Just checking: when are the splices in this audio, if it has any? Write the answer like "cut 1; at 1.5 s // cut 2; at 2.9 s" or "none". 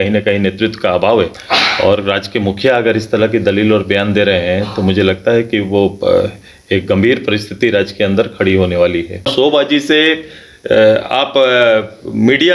cut 1; at 1.4 s // cut 2; at 9.3 s